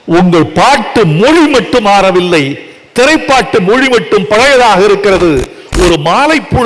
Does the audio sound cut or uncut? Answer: cut